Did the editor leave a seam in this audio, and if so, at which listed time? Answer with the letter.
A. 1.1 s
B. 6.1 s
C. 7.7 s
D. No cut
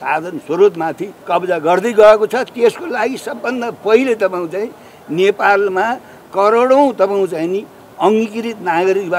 A